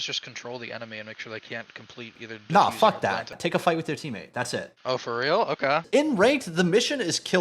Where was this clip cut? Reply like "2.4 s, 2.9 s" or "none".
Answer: 3.3 s, 5.8 s